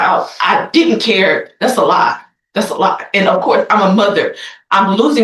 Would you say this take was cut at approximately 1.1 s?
no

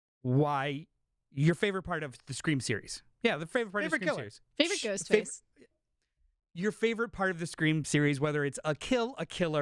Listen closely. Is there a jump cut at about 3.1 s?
no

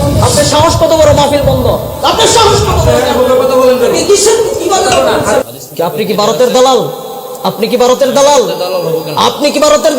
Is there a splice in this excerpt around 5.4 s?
yes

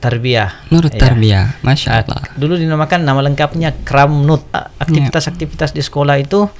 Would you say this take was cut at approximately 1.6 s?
no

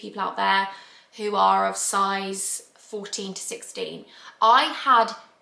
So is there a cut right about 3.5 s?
no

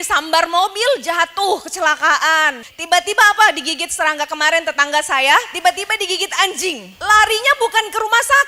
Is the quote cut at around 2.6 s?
yes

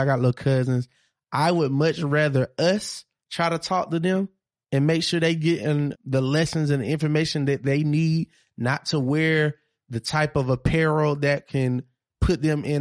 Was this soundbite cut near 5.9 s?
yes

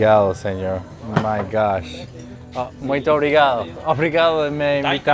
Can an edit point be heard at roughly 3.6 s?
no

